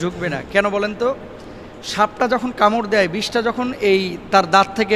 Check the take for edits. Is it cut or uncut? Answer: uncut